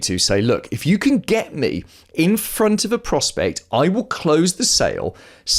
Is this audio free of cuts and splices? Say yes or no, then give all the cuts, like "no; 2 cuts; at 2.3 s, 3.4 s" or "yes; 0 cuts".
yes; 0 cuts